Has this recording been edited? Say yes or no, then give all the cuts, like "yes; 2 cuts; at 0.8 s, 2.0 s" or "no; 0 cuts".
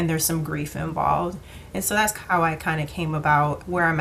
no; 0 cuts